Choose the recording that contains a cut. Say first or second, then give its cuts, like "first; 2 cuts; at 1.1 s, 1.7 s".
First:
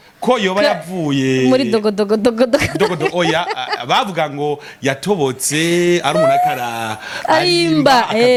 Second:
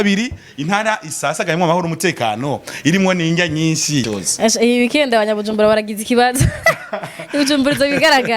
second; 1 cut; at 4.1 s